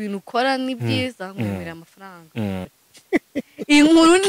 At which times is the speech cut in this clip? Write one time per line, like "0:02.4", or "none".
0:02.7